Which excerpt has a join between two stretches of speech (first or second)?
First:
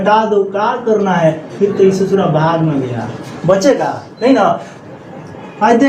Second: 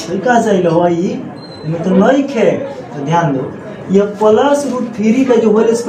first